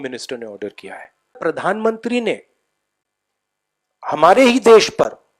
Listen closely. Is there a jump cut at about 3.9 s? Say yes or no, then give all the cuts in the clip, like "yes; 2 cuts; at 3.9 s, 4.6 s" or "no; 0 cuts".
no; 1 cut; at 1.4 s